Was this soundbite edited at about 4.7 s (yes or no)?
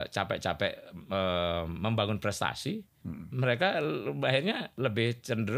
yes